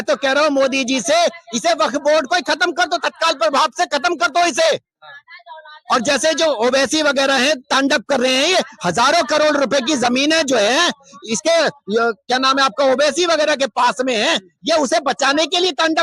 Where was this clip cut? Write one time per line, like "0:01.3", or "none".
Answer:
none